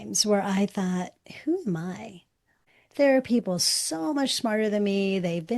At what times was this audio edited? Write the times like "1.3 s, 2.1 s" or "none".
2.6 s